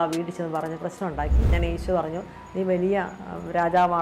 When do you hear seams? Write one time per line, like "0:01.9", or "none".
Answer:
0:01.5